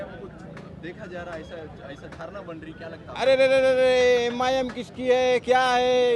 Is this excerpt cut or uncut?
uncut